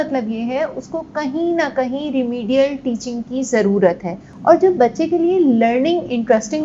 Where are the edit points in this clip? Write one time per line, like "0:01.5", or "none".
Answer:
0:04.3